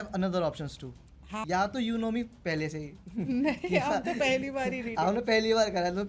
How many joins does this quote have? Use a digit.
1